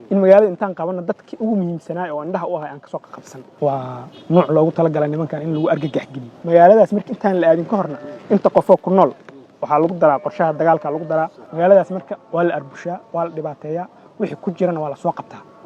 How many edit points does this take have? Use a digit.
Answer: 3